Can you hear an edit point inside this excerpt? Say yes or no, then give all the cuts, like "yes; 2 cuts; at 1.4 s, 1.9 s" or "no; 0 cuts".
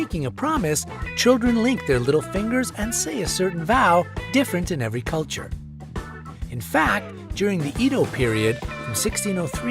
yes; 1 cut; at 1.5 s